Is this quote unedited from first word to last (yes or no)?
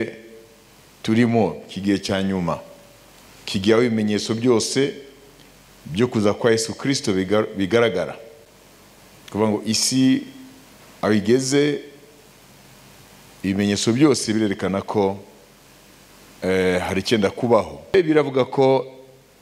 no